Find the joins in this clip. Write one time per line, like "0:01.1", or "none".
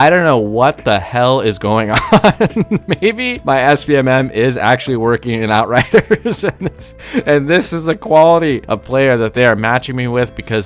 0:03.3
0:08.7